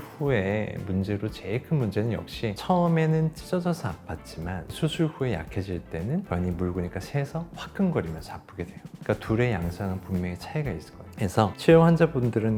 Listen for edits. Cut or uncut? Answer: uncut